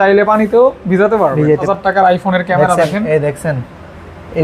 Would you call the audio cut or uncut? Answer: cut